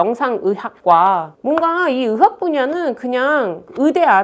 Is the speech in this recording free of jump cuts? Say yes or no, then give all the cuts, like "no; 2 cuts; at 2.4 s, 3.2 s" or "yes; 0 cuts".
no; 1 cut; at 1.3 s